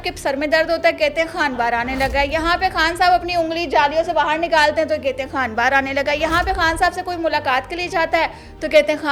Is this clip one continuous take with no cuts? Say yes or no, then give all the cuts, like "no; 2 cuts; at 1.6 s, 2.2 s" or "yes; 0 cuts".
yes; 0 cuts